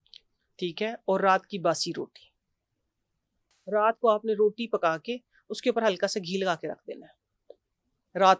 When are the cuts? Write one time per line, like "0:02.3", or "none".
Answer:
0:03.5